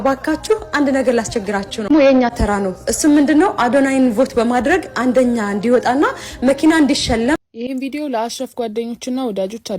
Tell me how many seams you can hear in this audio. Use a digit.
2